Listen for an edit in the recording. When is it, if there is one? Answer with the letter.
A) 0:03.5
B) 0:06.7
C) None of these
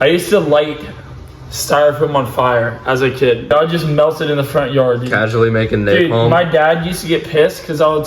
A